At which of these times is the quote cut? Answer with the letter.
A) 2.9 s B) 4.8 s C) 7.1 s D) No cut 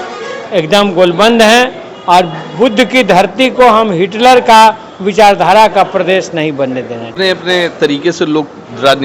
C